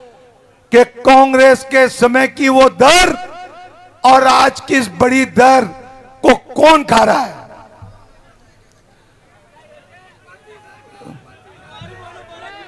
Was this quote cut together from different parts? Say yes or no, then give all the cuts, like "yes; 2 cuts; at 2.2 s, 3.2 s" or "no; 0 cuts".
no; 0 cuts